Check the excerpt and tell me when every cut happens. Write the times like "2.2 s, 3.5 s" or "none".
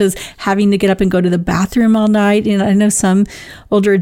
none